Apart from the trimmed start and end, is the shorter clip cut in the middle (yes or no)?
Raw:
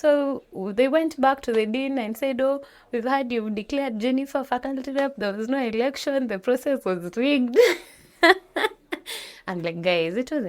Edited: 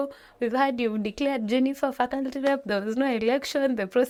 no